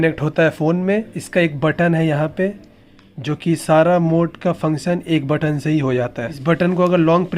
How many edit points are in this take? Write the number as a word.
one